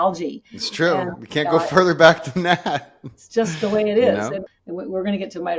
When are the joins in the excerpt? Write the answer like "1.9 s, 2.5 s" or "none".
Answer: 4.5 s